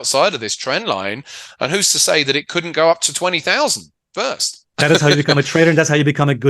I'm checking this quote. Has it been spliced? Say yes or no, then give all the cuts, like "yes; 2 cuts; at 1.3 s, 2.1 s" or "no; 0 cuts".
yes; 1 cut; at 4.6 s